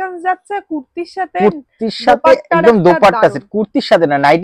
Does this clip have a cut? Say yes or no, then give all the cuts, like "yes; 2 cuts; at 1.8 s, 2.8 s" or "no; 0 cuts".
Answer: no; 0 cuts